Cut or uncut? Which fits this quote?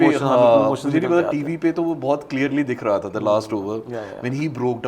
uncut